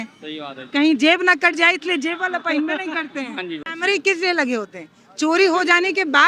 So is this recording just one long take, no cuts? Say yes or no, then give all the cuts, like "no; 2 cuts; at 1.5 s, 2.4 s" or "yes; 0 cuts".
no; 1 cut; at 3.7 s